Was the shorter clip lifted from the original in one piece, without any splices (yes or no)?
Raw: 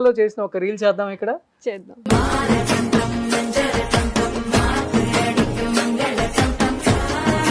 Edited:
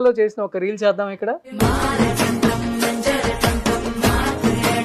no